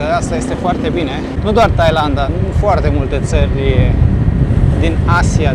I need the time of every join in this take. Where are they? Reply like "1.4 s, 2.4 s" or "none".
none

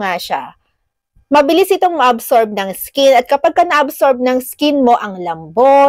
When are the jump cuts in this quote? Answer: none

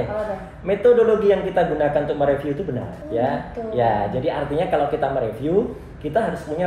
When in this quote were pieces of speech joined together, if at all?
2.9 s

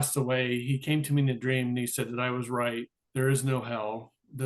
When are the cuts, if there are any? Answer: 3.0 s

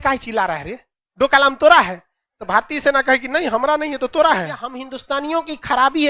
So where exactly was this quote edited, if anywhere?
4.9 s

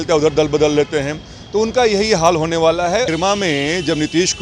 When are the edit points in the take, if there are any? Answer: 3.1 s

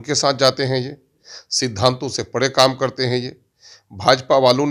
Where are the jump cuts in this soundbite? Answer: none

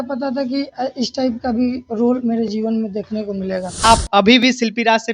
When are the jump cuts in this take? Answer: 3.8 s

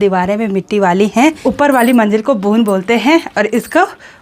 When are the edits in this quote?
1.4 s

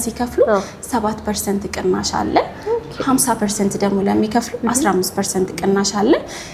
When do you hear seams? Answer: none

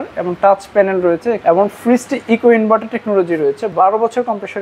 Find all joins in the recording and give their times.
1.4 s

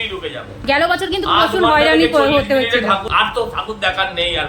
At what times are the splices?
3.1 s

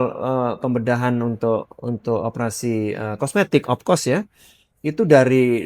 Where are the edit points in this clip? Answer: none

